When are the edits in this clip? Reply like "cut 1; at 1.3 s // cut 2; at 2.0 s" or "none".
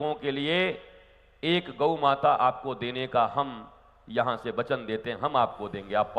none